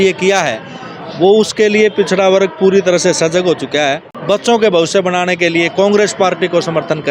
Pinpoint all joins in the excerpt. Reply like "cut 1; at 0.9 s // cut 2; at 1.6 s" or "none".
cut 1; at 4.1 s